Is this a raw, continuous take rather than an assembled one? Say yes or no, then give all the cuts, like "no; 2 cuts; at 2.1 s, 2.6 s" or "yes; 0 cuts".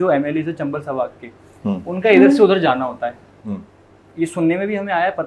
yes; 0 cuts